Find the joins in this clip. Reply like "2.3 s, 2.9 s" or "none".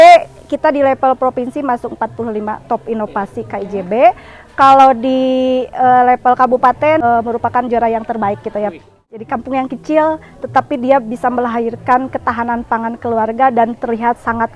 7.0 s, 8.9 s